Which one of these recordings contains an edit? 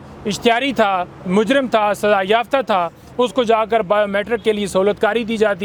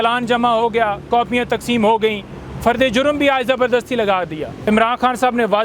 second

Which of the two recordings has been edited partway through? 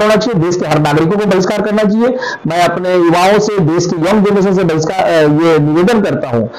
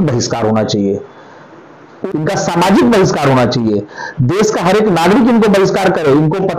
second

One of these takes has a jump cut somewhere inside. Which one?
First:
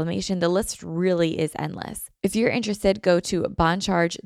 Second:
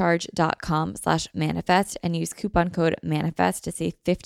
first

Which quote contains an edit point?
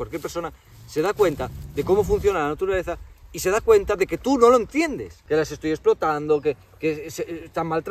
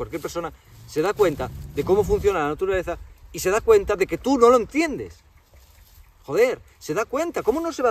first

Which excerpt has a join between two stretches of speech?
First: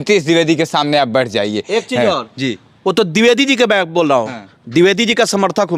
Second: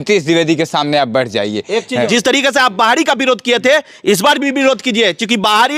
second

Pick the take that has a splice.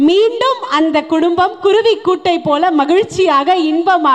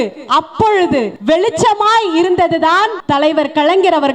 second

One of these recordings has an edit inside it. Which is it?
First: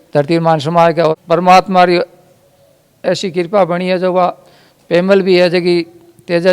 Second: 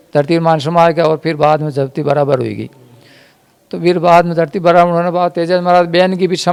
first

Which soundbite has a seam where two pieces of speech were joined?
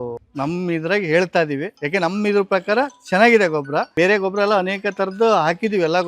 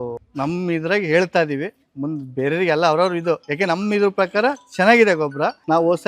first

